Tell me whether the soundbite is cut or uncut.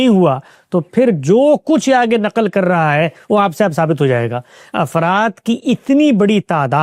uncut